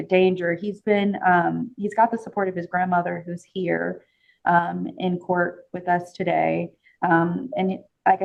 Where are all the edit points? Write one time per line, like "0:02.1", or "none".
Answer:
none